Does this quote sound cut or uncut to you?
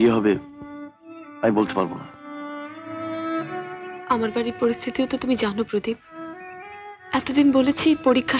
uncut